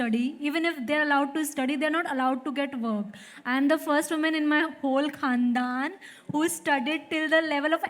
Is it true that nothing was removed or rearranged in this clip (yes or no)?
yes